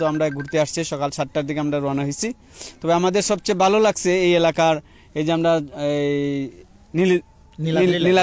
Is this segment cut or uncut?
uncut